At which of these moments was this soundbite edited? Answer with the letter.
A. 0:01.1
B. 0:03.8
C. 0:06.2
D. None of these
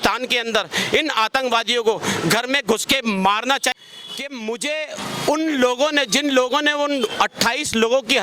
B